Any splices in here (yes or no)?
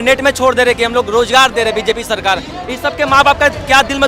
no